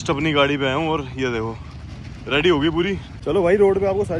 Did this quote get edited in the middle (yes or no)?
yes